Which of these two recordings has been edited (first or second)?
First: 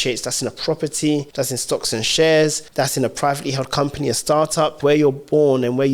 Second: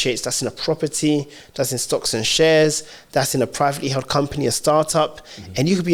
first